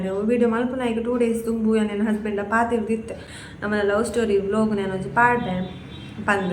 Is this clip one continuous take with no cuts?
yes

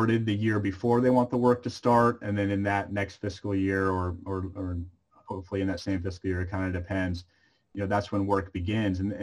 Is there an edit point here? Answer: no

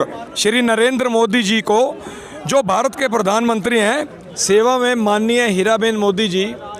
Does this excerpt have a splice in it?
yes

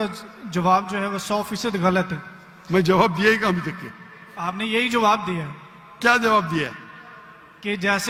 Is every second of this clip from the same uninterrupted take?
yes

